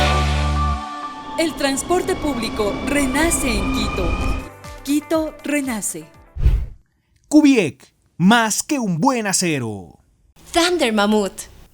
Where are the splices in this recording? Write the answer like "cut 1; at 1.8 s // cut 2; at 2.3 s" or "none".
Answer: cut 1; at 1.0 s